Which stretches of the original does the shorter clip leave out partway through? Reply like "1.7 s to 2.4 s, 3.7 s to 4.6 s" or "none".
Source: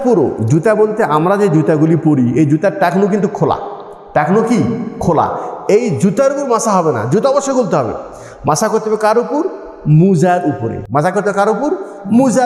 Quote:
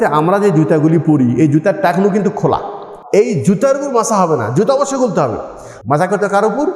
3.9 s to 5.5 s, 8.2 s to 10.7 s